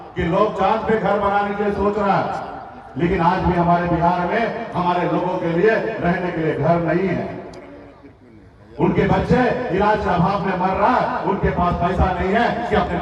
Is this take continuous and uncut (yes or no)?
yes